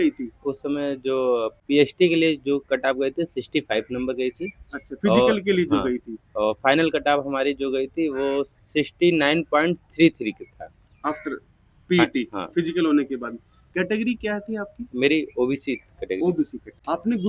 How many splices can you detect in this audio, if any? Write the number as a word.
zero